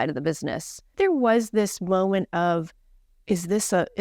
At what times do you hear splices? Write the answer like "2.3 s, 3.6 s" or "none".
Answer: 0.9 s